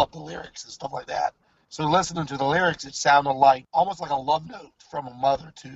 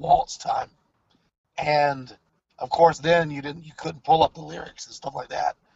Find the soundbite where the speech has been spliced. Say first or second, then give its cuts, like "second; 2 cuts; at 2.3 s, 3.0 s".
first; 1 cut; at 3.6 s